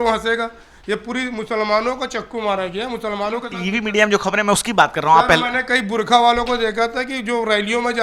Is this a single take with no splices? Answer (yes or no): yes